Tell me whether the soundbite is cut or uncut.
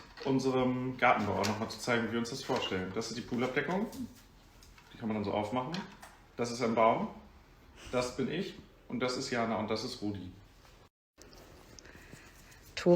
cut